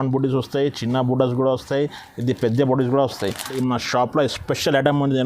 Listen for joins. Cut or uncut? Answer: cut